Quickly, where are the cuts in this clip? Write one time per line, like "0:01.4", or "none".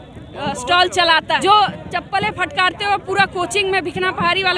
0:01.3